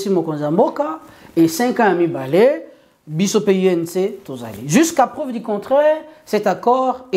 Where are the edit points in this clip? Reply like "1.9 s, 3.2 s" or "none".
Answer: none